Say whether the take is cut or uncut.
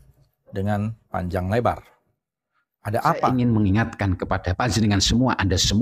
cut